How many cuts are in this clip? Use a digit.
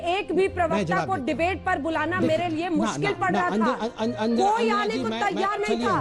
0